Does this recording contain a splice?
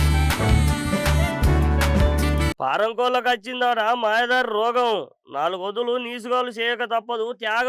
no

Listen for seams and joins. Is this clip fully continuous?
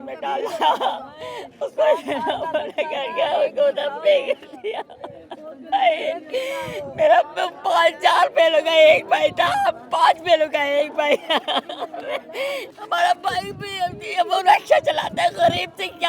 no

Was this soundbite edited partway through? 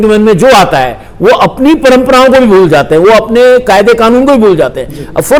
no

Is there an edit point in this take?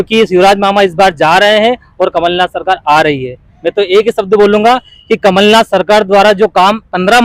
no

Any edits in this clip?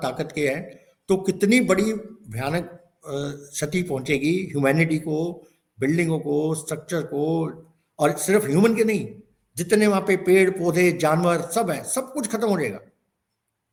no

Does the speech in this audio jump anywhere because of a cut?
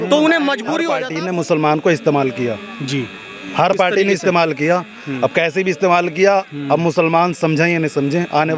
yes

